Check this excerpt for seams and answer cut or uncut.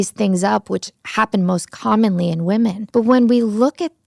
cut